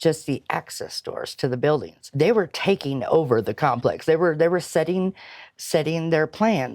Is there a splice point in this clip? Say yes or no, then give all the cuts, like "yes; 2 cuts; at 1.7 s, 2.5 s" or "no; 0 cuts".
yes; 1 cut; at 2.0 s